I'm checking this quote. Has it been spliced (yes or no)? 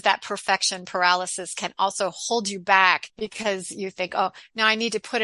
yes